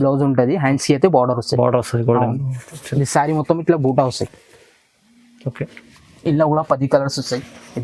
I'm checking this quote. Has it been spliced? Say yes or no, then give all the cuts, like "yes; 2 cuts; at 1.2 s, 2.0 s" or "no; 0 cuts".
no; 0 cuts